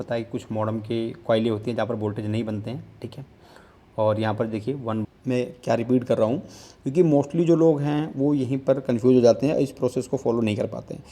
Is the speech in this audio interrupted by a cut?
yes; 1 cut; at 5.0 s

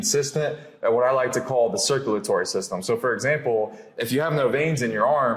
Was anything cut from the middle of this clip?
no; 0 cuts

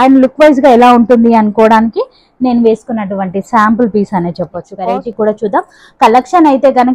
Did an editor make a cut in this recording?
yes; 1 cut; at 4.7 s

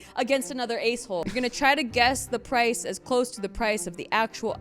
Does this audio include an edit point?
yes; 1 cut; at 1.3 s

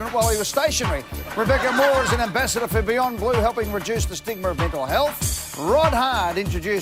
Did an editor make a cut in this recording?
no; 0 cuts

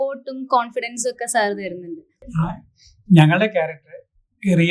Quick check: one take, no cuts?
no; 1 cut; at 2.3 s

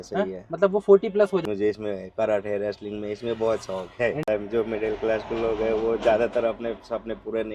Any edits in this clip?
yes; 2 cuts; at 1.4 s, 4.3 s

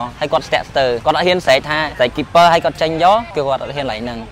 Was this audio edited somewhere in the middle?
yes; 3 cuts; at 1.0 s, 1.9 s, 3.3 s

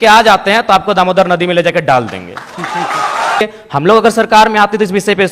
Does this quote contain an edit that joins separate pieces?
yes; 1 cut; at 3.4 s

